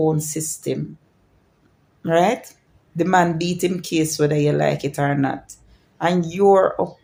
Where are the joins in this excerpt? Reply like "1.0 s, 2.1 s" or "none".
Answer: none